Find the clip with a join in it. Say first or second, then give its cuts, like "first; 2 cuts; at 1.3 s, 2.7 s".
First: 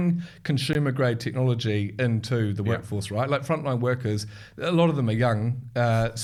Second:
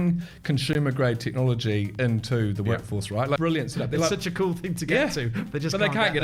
second; 1 cut; at 3.4 s